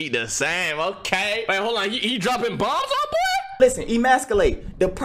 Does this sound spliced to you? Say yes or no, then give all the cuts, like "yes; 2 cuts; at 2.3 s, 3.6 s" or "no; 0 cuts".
yes; 2 cuts; at 1.5 s, 3.6 s